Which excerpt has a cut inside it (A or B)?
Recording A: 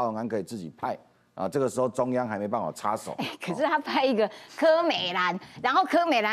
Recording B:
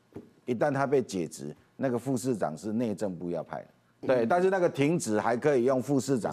B